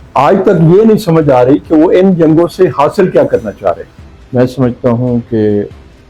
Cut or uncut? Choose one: uncut